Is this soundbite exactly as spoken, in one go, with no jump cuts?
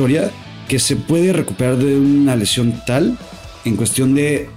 yes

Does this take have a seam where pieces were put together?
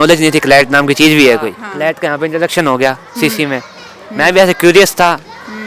yes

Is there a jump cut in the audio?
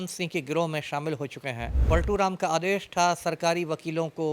yes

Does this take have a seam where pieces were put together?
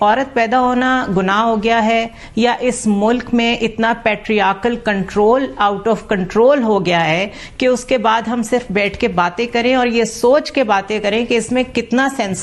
no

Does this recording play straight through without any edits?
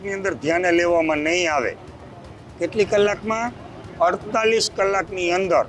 yes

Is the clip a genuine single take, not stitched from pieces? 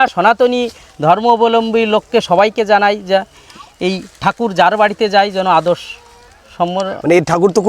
yes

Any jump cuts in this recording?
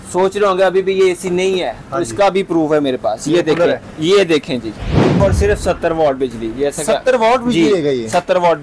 yes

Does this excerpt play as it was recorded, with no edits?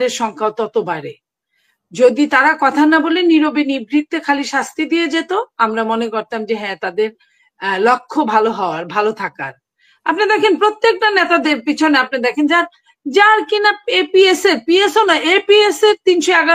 yes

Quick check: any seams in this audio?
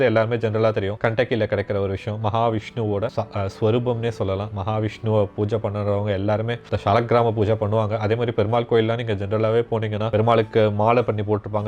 yes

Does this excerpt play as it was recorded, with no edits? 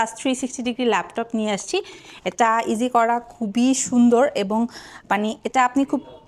yes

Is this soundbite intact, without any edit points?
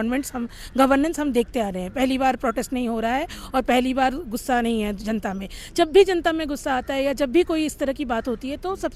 yes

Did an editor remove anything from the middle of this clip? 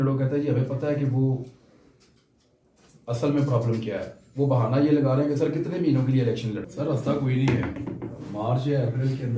yes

